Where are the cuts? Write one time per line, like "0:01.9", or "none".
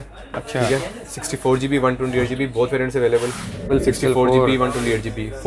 0:03.7

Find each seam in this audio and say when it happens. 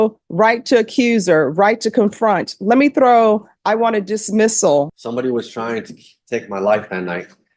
0:04.9

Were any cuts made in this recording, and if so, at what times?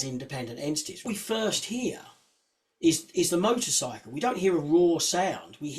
0:01.1

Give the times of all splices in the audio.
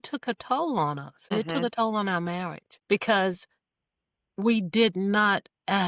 0:02.8

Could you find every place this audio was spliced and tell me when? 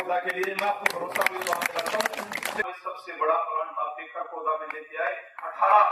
0:02.7

